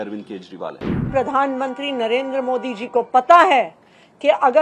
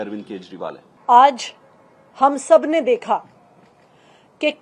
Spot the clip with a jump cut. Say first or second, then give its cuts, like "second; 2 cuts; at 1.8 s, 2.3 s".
first; 1 cut; at 0.9 s